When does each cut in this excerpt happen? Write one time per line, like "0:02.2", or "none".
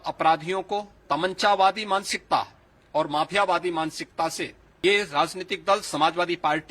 0:00.9
0:04.6